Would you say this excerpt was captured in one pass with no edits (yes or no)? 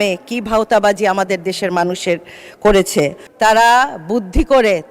no